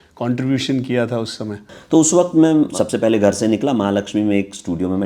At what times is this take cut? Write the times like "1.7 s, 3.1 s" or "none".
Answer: 1.5 s, 2.7 s